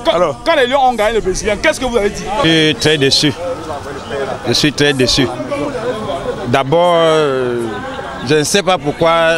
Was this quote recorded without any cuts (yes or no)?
no